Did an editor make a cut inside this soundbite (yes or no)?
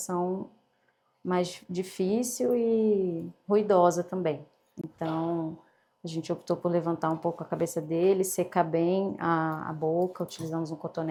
no